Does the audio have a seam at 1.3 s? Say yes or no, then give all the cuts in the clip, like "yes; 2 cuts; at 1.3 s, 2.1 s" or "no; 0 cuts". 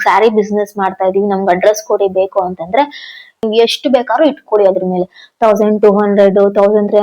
no; 1 cut; at 3.4 s